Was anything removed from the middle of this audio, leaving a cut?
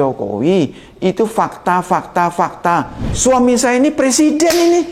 yes; 1 cut; at 3.0 s

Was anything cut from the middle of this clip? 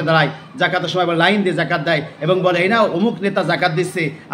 no; 0 cuts

